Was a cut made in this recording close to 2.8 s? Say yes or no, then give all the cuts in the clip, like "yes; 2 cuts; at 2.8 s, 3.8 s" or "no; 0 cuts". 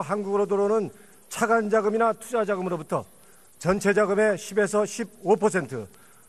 yes; 1 cut; at 2.8 s